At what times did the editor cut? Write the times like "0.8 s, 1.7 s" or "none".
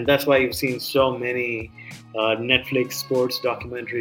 none